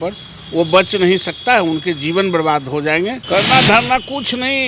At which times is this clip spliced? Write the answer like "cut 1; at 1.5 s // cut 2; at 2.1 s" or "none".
cut 1; at 3.2 s